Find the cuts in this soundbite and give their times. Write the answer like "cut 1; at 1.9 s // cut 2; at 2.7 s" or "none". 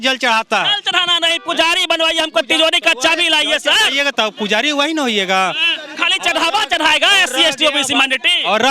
none